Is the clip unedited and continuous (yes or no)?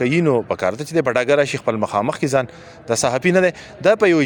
yes